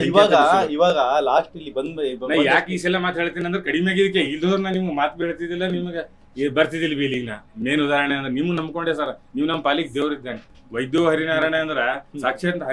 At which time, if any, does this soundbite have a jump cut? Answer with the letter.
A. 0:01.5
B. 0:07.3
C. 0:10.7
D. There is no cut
D